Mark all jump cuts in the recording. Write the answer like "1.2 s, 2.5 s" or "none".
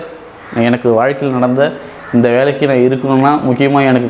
none